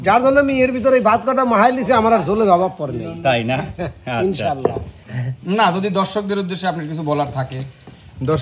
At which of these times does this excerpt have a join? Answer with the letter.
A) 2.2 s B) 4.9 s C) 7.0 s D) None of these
B